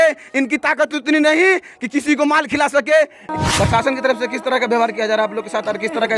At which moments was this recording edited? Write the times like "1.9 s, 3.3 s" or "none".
3.2 s